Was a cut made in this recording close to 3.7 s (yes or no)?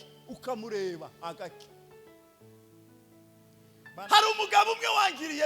yes